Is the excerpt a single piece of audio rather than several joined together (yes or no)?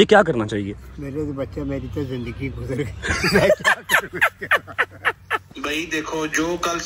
no